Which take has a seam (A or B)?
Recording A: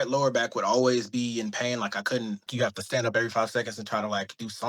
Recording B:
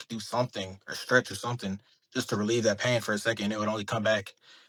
A